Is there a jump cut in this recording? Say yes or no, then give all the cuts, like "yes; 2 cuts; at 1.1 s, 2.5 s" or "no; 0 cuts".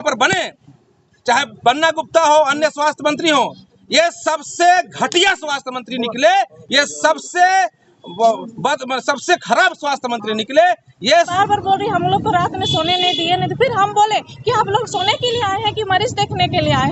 yes; 1 cut; at 11.3 s